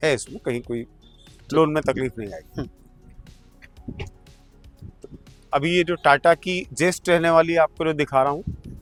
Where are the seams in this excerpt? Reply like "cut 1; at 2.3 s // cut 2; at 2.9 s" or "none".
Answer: none